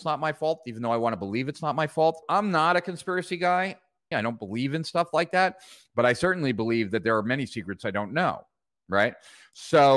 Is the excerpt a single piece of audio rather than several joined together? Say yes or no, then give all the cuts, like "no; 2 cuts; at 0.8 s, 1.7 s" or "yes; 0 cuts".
no; 2 cuts; at 2.2 s, 4.1 s